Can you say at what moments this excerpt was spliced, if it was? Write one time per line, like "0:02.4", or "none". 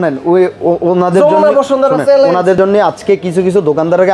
none